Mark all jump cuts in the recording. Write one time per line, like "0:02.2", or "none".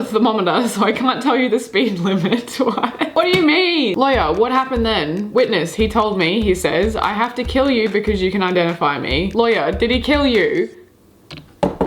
0:03.1
0:03.9